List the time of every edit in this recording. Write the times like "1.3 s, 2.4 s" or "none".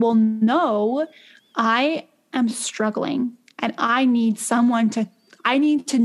none